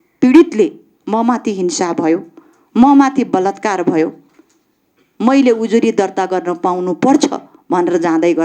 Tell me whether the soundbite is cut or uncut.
uncut